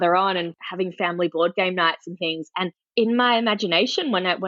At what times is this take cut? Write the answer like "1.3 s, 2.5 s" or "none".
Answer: 2.8 s